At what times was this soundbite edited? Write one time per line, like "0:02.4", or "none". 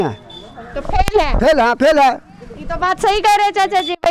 none